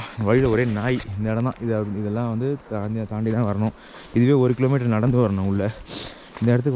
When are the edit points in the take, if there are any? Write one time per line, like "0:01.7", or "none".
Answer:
none